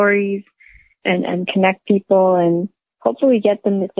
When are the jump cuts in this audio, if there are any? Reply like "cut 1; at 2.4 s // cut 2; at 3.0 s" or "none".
none